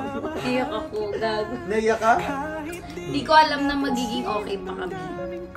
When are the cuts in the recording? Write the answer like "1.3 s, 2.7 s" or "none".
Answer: none